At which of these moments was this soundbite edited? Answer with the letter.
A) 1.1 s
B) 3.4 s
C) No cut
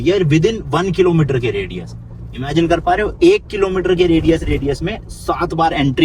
C